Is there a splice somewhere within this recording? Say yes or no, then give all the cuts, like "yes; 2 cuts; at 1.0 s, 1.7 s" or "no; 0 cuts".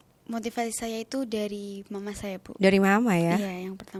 no; 0 cuts